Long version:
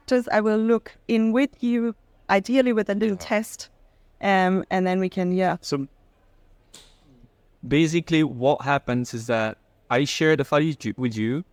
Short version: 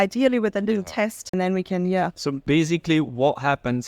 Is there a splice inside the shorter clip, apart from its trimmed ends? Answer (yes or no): yes